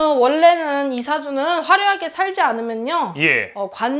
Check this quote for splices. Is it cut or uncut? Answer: uncut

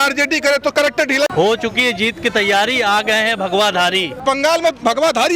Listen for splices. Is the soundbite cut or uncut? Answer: cut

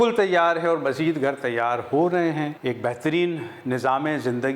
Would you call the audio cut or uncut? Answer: cut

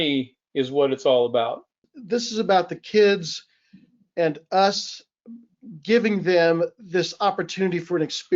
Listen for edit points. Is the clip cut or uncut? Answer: cut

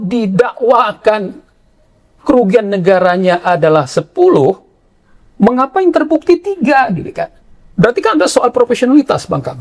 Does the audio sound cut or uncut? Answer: uncut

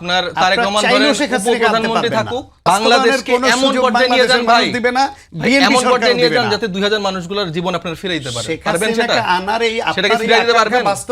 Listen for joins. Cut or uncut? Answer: cut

